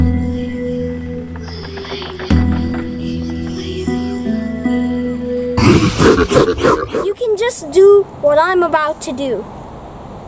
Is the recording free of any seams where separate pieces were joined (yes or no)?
no